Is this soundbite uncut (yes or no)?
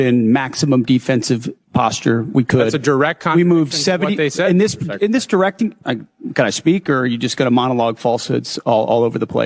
yes